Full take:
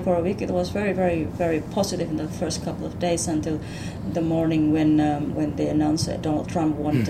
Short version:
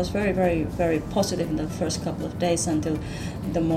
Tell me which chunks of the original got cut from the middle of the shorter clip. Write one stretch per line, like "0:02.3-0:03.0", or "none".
none